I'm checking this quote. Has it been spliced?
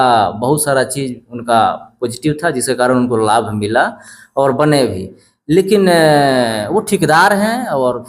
no; 0 cuts

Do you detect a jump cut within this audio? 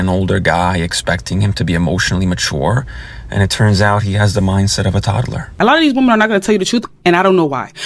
yes; 1 cut; at 5.5 s

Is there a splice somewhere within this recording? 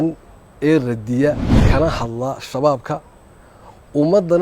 yes; 1 cut; at 1.5 s

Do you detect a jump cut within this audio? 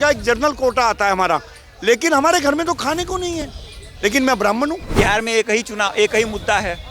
yes; 1 cut; at 4.8 s

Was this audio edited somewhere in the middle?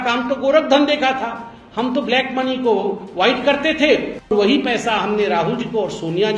yes; 1 cut; at 4.3 s

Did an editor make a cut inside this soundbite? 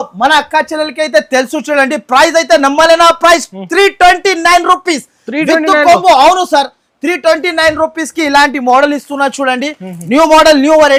no; 0 cuts

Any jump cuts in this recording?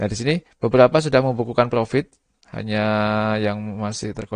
no; 0 cuts

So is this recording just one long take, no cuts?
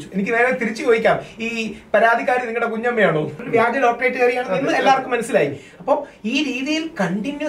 no; 1 cut; at 3.4 s

